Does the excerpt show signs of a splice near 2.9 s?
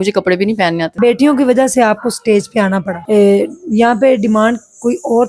yes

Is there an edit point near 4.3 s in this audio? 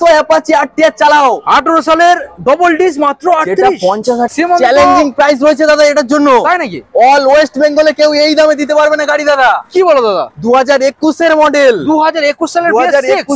yes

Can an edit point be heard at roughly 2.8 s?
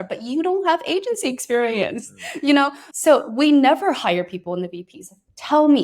yes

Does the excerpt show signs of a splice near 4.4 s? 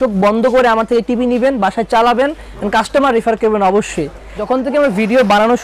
yes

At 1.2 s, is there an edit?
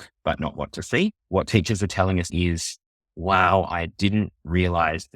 yes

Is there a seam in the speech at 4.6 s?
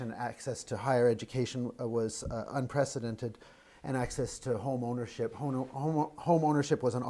yes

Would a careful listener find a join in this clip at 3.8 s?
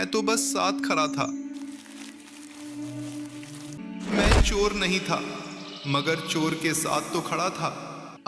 yes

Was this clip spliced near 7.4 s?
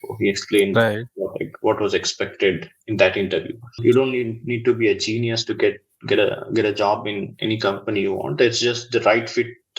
no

